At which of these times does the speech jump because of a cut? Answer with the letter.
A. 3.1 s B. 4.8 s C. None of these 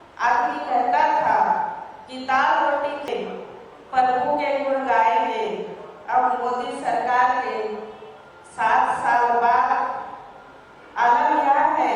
A